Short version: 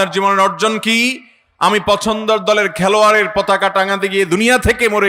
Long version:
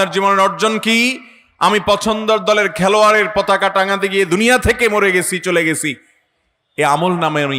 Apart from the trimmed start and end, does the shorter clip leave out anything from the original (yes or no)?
no